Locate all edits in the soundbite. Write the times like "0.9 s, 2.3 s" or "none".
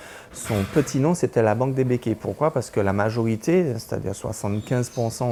none